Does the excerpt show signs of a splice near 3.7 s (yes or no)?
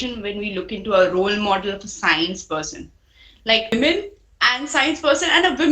yes